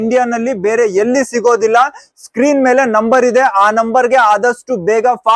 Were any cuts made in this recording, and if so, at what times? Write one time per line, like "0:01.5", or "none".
none